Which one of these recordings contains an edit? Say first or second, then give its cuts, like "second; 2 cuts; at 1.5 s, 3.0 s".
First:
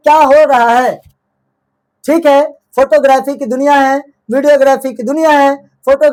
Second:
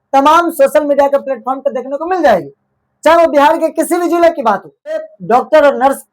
second; 1 cut; at 5.1 s